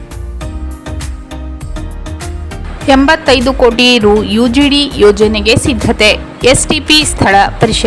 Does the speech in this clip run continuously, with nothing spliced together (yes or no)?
yes